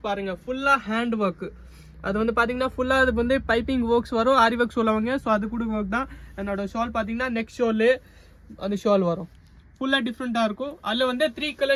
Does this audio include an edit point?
no; 0 cuts

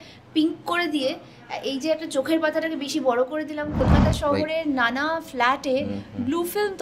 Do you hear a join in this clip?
yes; 1 cut; at 3.8 s

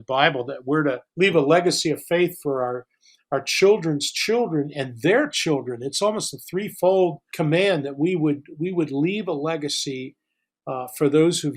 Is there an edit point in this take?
yes; 2 cuts; at 1.1 s, 7.3 s

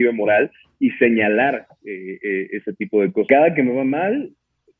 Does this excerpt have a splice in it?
yes; 1 cut; at 3.3 s

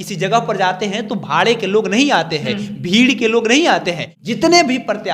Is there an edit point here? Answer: yes; 1 cut; at 4.1 s

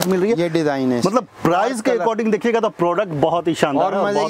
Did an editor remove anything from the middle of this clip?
no; 0 cuts

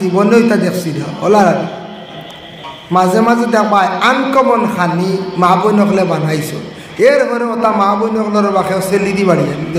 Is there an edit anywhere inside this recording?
no; 0 cuts

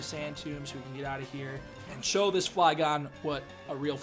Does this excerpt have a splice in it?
yes; 1 cut; at 1.8 s

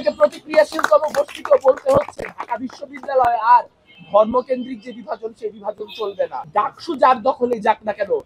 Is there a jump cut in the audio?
yes; 1 cut; at 6.4 s

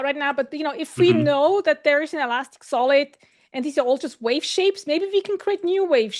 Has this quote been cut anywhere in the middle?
no; 0 cuts

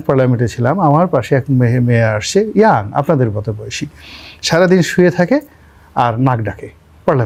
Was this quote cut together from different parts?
no; 0 cuts

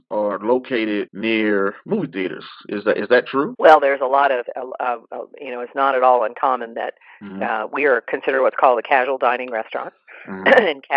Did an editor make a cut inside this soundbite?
yes; 2 cuts; at 1.1 s, 3.5 s

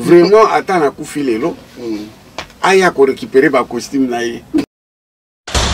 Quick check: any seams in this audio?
yes; 1 cut; at 4.7 s

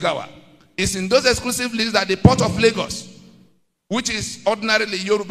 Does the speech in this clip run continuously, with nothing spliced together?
yes; 0 cuts

